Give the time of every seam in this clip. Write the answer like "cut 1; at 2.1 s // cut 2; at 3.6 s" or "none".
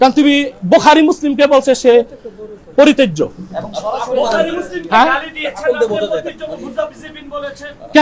none